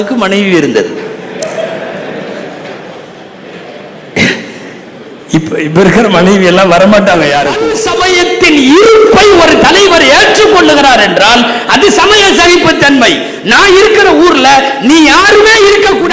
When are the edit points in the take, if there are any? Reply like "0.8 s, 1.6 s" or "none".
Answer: 7.7 s

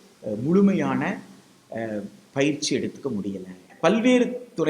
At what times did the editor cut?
3.6 s

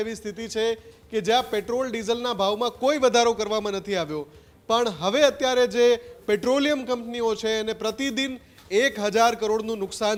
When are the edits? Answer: none

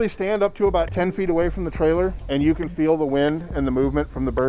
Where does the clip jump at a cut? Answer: none

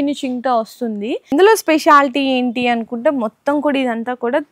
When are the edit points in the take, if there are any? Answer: 1.2 s

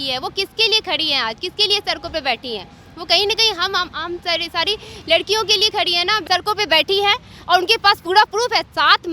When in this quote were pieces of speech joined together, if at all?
6.2 s

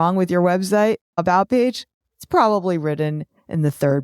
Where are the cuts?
1.2 s

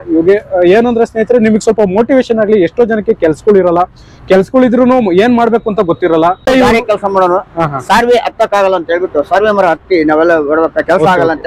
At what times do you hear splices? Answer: 6.5 s

